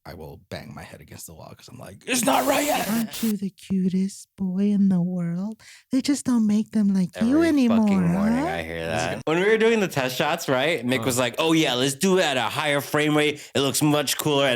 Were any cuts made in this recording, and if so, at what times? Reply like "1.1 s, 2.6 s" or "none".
2.8 s, 9.1 s